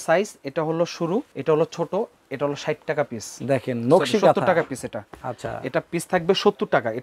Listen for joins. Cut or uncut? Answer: cut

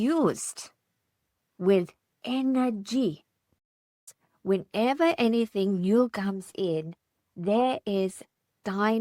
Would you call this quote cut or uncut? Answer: cut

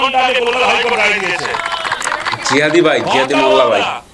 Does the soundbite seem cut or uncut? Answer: uncut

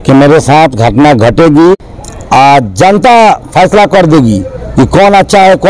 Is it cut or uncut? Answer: cut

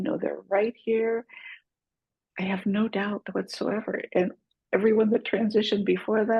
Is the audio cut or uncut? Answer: uncut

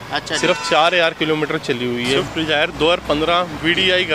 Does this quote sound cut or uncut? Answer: cut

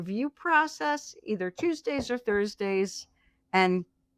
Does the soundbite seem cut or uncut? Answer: uncut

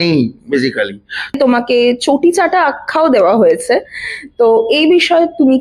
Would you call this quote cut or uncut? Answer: cut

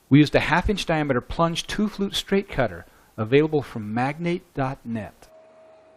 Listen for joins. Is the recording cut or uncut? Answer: cut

